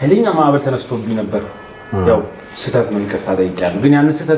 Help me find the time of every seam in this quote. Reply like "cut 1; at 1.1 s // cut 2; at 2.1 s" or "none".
none